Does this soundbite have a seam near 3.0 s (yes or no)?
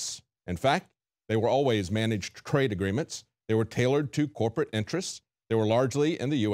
yes